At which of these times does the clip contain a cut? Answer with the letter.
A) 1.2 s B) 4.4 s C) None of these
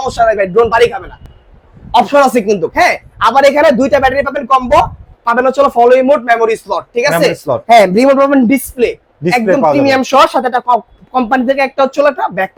C